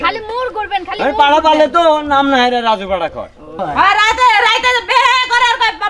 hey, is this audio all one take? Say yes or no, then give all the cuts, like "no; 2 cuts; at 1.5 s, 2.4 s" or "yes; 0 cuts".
no; 1 cut; at 3.1 s